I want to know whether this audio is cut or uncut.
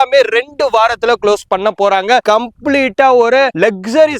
cut